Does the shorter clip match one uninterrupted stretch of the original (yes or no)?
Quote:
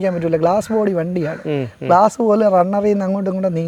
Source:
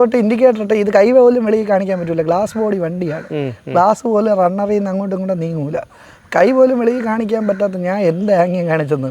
yes